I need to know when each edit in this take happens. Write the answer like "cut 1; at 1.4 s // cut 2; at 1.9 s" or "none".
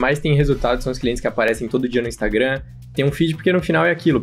none